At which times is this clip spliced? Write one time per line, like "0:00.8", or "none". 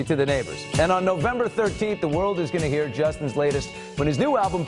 0:02.7